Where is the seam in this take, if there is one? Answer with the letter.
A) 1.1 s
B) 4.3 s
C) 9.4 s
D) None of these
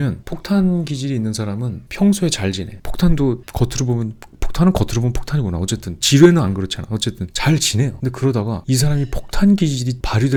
D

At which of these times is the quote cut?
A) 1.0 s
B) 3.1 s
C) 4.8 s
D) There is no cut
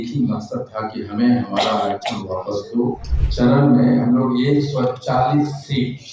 B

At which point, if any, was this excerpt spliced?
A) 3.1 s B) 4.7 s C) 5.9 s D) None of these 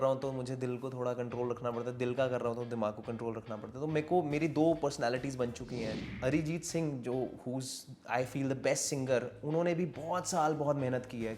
C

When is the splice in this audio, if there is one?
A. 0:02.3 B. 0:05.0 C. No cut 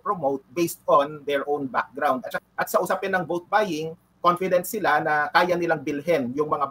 A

